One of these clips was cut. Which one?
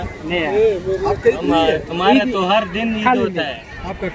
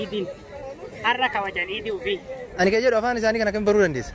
second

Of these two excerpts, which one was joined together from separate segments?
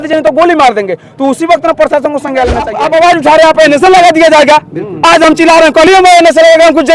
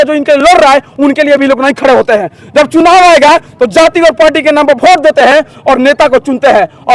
first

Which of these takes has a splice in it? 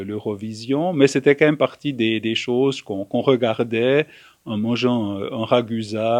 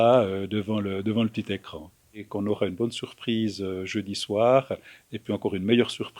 second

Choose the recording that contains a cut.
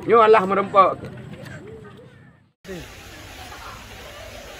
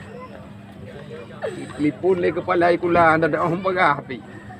first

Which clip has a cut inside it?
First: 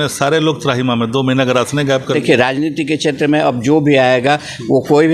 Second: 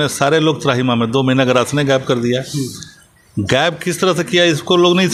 first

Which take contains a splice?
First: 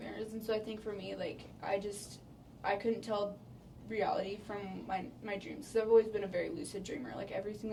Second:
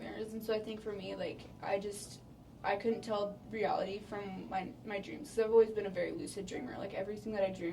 second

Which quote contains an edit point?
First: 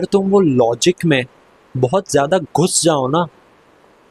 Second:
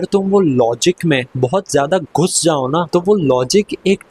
second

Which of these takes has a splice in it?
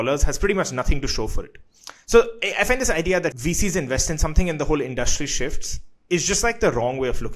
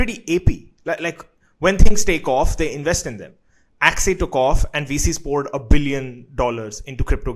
first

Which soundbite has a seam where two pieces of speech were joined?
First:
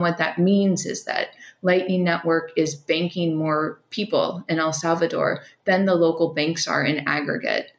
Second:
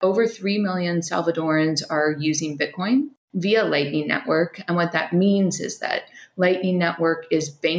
second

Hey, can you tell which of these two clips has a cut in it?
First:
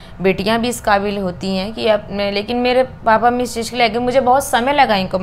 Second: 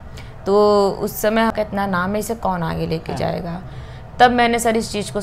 second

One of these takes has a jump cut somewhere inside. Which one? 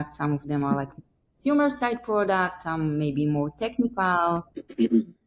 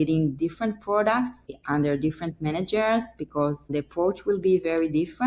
second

